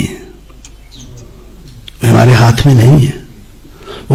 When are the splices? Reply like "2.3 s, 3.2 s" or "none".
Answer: none